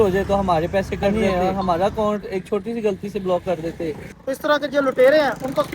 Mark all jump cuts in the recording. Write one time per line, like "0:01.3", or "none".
0:01.1
0:04.1